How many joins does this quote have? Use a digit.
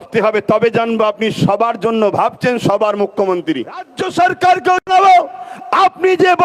1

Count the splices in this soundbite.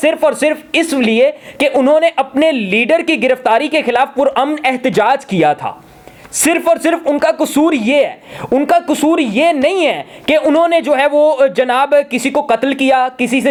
0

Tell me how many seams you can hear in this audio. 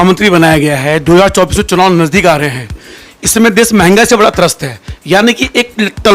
0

